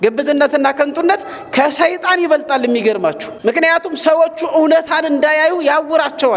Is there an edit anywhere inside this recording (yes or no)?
yes